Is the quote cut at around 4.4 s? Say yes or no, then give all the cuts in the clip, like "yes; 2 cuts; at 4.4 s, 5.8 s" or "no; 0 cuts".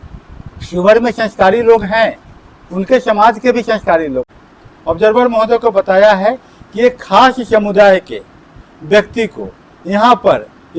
yes; 1 cut; at 4.4 s